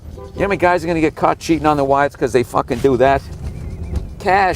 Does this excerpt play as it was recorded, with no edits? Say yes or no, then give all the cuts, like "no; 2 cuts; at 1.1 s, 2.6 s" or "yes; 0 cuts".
no; 1 cut; at 2.1 s